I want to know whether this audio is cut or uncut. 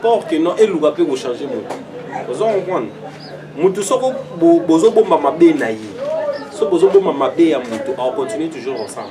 uncut